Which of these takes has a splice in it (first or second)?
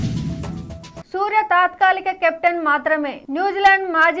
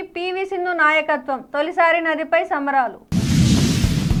first